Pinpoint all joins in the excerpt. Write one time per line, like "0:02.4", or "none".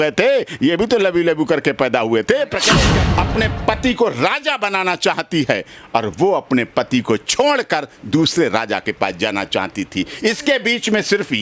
0:02.9

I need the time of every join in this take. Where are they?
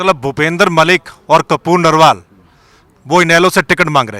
none

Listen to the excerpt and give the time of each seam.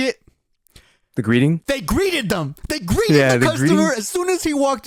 none

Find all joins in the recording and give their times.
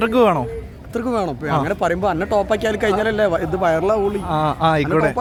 none

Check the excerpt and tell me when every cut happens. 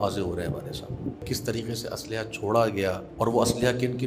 0:01.2
0:03.1

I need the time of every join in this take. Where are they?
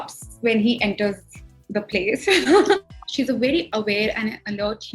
0:03.5

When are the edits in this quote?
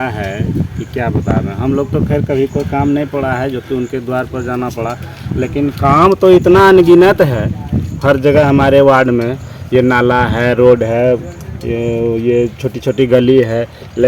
none

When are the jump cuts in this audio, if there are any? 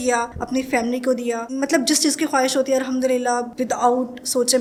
none

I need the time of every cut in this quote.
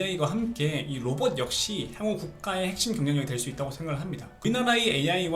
0:04.4

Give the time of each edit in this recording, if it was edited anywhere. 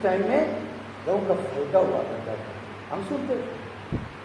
none

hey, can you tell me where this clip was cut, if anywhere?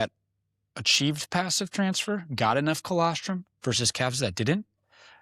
none

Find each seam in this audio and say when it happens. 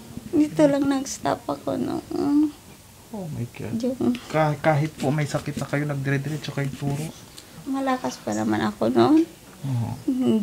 0:07.5

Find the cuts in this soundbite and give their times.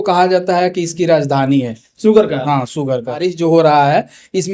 0:03.3

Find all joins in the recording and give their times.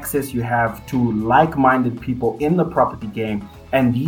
none

